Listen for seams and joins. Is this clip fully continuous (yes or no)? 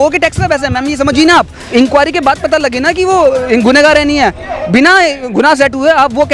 no